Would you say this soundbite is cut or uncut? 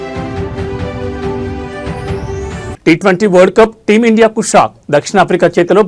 cut